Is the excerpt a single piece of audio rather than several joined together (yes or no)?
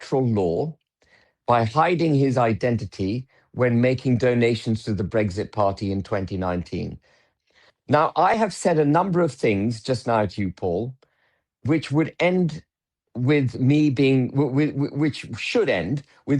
no